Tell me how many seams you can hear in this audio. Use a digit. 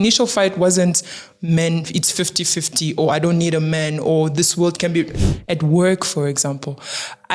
1